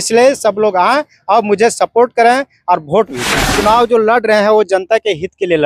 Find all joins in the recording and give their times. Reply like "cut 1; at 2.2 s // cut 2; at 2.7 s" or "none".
cut 1; at 3.5 s